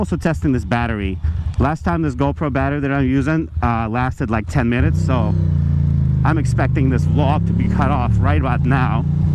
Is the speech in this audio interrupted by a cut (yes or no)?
no